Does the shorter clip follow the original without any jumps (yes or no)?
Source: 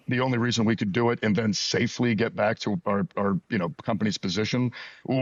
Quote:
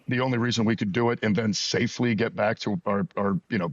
yes